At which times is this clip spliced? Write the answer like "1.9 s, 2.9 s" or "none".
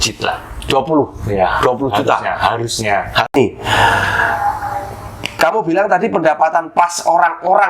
3.3 s